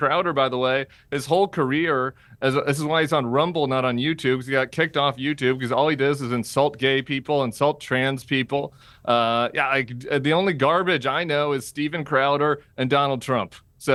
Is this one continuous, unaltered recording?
yes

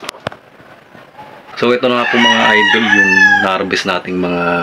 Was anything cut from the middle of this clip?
yes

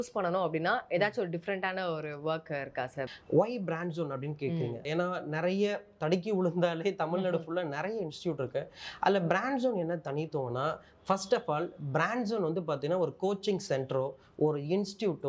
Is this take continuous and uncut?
yes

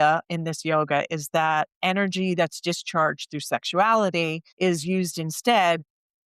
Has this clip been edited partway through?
yes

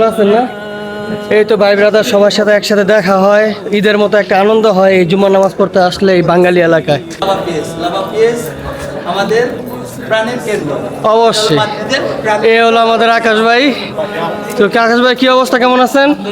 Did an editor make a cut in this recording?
yes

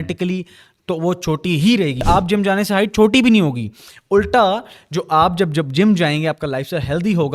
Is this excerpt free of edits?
no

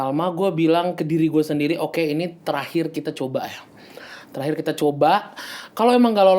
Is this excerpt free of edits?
yes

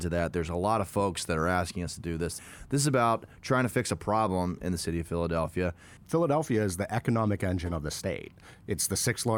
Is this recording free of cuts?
no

